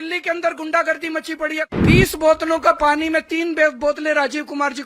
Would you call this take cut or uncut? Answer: cut